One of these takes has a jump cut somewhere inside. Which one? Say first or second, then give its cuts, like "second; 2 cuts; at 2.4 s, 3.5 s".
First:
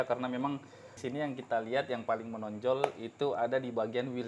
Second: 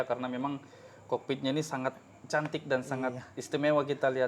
first; 1 cut; at 1.0 s